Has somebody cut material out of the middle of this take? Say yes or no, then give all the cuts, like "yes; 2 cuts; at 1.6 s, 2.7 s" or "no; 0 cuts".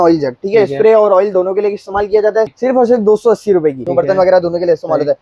yes; 2 cuts; at 2.5 s, 3.8 s